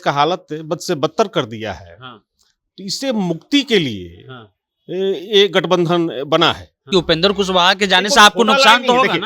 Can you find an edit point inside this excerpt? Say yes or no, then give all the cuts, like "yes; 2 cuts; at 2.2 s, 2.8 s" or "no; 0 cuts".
yes; 1 cut; at 6.9 s